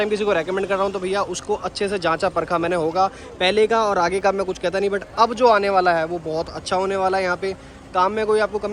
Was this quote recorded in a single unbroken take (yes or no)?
yes